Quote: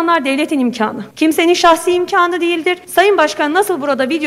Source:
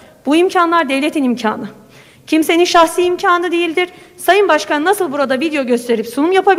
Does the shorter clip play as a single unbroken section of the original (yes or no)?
no